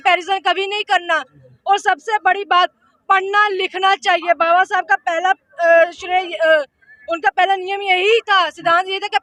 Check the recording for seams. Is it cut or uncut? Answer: uncut